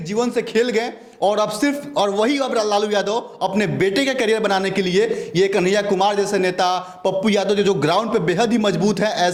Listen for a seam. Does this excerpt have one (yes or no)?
no